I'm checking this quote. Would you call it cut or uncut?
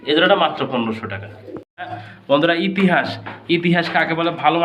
cut